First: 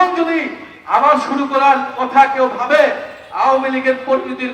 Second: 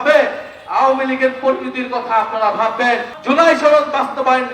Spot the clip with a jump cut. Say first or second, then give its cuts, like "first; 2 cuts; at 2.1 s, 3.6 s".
second; 1 cut; at 3.1 s